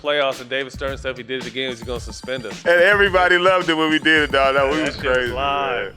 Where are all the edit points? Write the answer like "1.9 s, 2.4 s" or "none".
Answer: 2.5 s

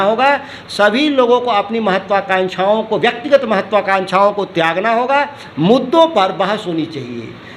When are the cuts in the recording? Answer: none

